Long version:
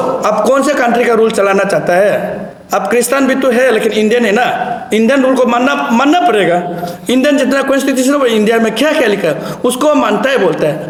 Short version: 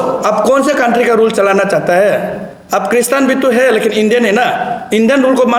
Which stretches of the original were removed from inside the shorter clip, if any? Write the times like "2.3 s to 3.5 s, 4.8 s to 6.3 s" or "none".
none

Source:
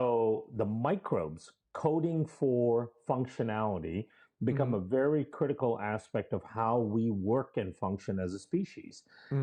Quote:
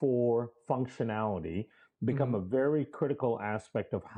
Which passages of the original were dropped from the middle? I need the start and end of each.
none

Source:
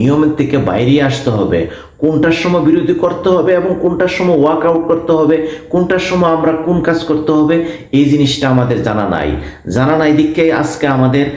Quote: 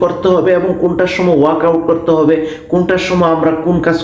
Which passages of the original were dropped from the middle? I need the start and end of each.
none

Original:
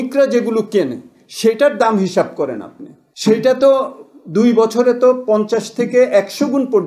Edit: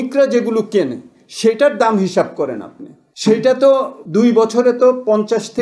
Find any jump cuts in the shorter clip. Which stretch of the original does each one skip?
4.0 s to 4.2 s

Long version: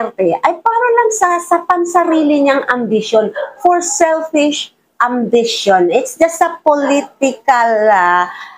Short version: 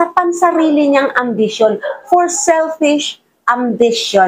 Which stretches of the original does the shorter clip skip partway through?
none

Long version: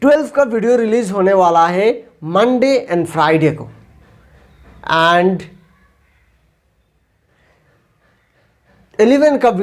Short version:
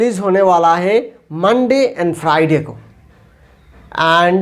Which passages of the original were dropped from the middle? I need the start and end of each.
none

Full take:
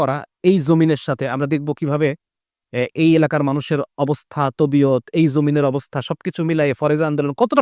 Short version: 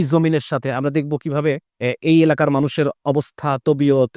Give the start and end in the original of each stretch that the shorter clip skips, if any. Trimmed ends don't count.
2.3 s to 2.6 s

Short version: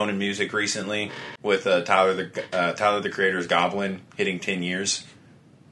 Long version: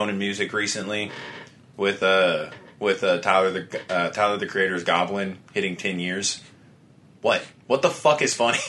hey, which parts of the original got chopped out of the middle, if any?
1.2 s to 2.6 s

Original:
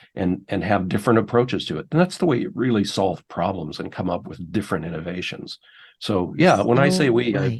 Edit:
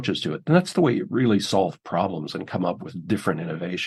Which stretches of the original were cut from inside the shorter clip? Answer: none

